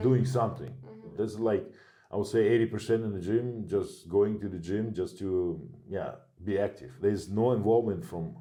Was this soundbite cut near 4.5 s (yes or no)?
no